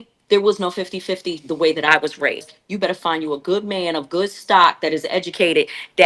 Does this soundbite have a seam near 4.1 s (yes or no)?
no